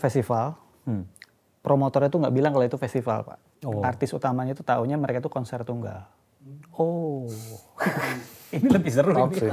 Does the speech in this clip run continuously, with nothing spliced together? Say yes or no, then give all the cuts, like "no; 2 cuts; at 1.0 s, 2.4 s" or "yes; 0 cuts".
yes; 0 cuts